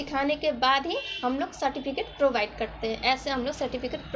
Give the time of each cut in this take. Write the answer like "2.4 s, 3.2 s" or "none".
none